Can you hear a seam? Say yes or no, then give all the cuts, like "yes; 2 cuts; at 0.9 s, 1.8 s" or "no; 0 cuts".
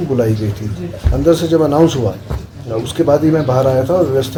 no; 0 cuts